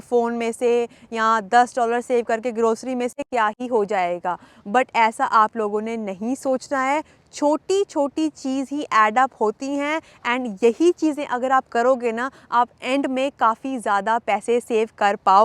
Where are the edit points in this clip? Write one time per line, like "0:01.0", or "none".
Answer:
none